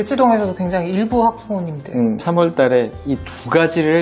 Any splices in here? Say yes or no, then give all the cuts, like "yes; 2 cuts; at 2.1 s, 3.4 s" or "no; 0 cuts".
yes; 1 cut; at 2.2 s